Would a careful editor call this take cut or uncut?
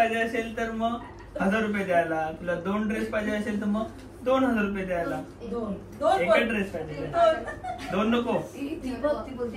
uncut